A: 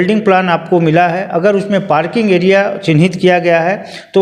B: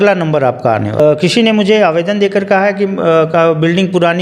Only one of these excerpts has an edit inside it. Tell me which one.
B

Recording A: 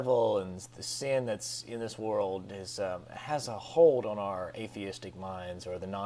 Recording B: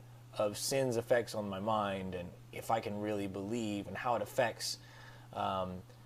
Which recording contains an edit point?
A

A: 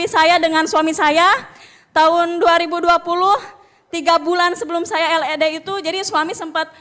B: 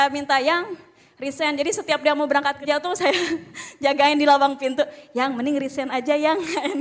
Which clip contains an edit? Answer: B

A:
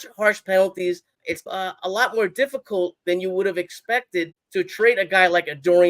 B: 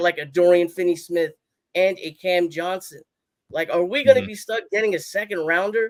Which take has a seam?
A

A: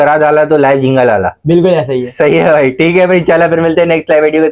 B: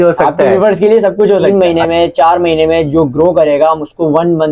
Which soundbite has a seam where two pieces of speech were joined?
B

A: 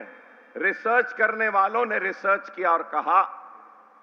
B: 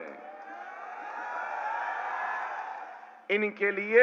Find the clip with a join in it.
B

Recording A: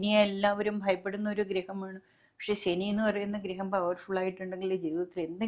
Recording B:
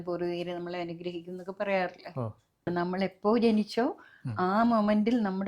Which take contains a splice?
B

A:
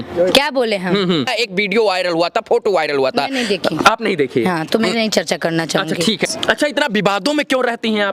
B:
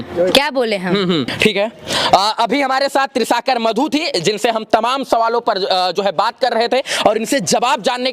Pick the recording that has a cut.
A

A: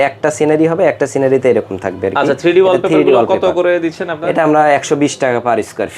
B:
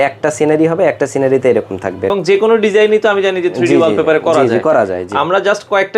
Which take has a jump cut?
B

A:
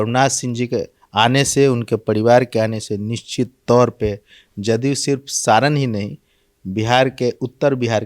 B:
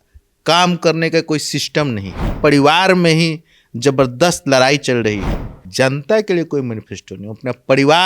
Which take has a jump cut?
B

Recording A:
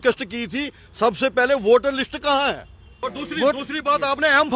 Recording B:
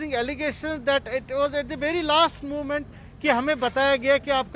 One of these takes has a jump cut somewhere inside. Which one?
A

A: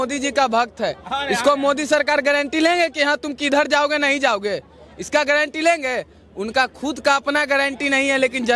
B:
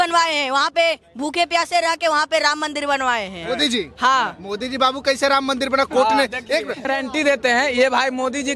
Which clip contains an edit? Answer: B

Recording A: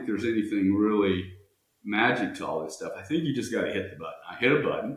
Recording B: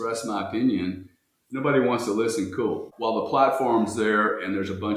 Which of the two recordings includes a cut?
B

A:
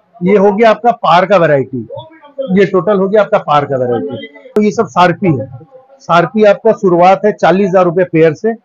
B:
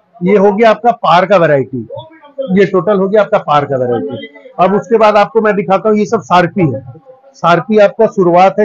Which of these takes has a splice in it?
A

